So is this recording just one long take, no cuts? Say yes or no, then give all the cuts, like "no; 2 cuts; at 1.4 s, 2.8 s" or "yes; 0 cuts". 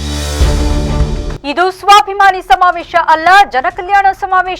no; 1 cut; at 1.3 s